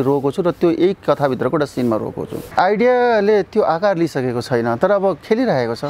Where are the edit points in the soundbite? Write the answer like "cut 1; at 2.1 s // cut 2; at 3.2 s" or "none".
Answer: cut 1; at 2.4 s